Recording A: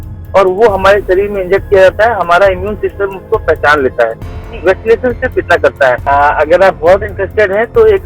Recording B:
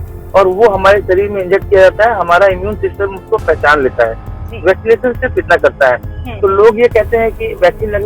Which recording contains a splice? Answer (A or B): A